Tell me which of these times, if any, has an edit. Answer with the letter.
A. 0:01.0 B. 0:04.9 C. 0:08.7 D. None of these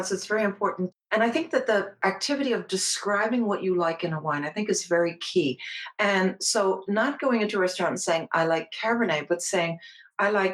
A